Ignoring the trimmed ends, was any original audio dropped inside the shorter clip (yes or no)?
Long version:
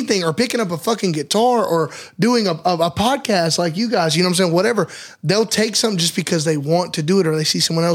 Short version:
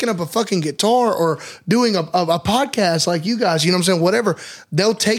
no